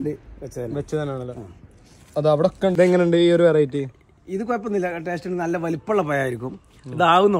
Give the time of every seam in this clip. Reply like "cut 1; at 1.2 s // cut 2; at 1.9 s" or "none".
cut 1; at 2.7 s